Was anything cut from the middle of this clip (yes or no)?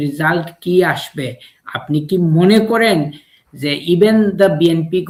no